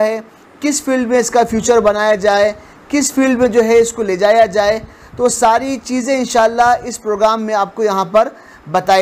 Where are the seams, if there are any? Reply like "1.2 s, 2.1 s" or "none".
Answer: none